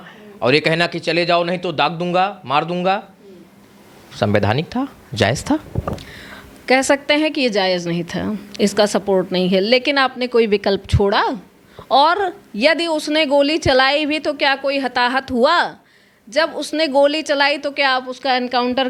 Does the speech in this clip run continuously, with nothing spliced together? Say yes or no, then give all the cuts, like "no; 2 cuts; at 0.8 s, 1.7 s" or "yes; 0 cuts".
yes; 0 cuts